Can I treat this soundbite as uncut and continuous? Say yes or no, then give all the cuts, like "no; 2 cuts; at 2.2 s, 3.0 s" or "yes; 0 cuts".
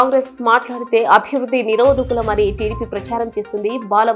yes; 0 cuts